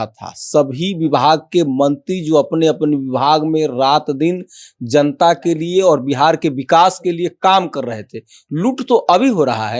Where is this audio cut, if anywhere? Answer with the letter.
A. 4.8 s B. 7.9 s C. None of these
C